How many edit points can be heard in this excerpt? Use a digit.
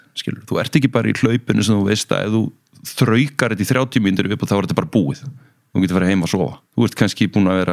1